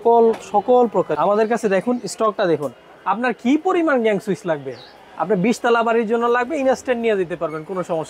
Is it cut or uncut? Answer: cut